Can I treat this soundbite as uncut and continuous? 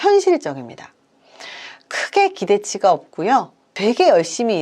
no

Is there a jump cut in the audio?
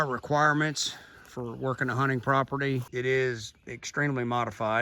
yes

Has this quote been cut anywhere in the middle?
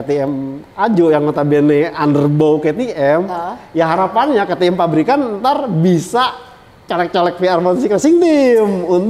no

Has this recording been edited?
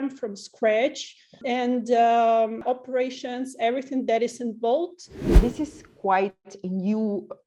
yes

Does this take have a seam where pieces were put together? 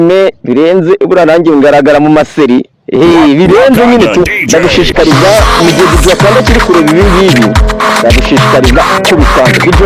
no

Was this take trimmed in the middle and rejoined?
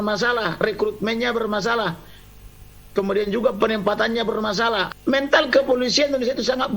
yes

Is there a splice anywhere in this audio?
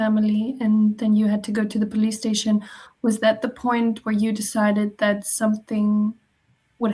no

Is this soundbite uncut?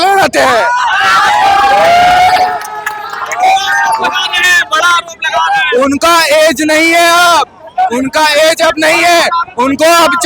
yes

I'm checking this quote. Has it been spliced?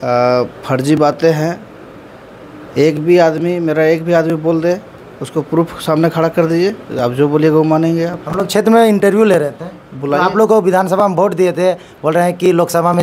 no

